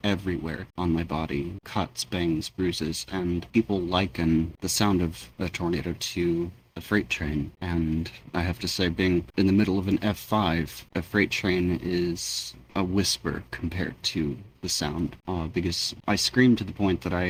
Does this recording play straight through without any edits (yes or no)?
yes